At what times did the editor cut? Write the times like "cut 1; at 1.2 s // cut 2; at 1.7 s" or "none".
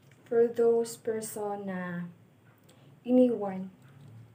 none